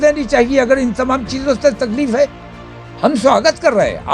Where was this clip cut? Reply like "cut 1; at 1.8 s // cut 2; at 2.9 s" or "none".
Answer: none